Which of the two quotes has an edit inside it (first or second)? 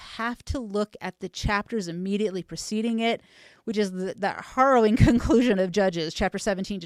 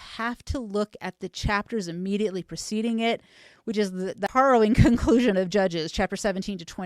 second